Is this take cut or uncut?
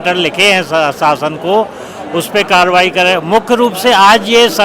uncut